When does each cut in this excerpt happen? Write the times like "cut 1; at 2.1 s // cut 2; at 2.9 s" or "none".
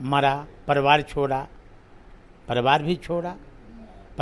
none